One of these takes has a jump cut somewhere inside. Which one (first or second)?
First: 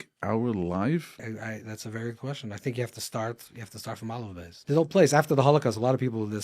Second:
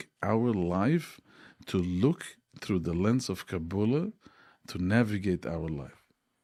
first